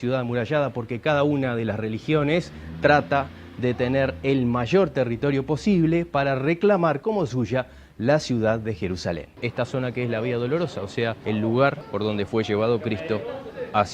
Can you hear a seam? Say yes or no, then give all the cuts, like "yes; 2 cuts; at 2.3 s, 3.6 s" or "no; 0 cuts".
yes; 3 cuts; at 9.2 s, 11.2 s, 11.8 s